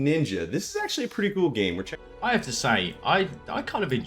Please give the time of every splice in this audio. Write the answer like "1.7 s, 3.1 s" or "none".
1.8 s